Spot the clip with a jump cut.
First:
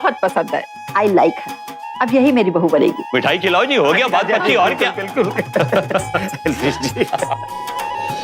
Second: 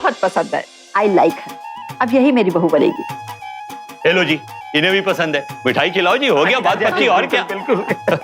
first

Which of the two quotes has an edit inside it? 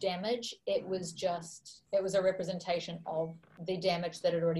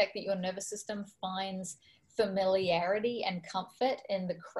first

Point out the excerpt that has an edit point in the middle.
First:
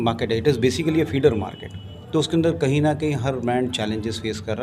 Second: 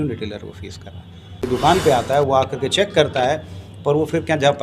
second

